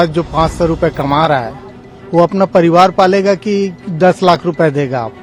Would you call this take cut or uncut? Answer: uncut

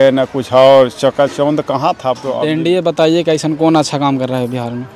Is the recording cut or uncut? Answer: cut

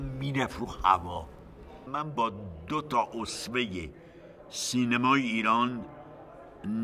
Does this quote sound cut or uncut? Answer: cut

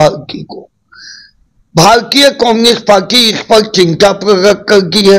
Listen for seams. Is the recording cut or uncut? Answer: uncut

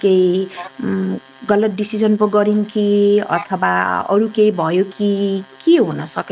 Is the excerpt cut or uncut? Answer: uncut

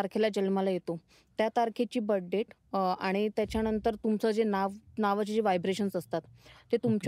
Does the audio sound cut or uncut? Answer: uncut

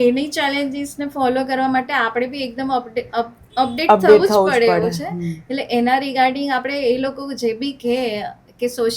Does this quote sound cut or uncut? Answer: uncut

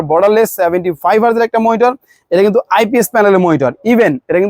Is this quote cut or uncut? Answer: uncut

